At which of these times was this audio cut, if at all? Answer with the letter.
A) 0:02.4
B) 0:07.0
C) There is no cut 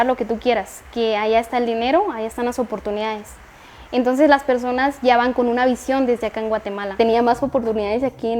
B